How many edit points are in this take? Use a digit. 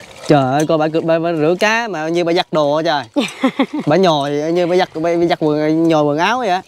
0